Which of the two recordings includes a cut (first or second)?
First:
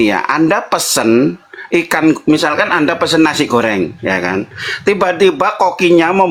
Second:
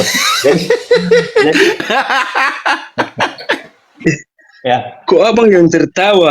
second